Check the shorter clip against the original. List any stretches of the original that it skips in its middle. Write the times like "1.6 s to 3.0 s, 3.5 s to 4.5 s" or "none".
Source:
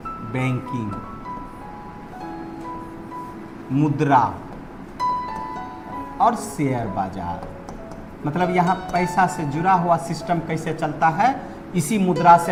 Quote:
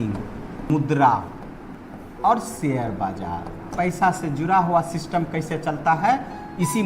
1.5 s to 3.8 s, 4.8 s to 5.7 s, 7.6 s to 8.8 s

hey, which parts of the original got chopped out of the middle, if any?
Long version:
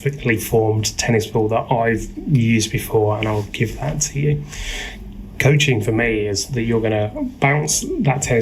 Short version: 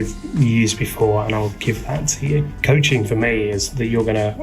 4.5 s to 5.3 s

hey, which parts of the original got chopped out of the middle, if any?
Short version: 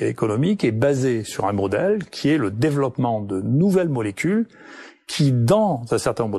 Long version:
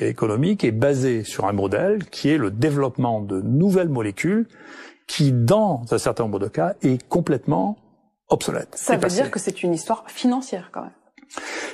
none

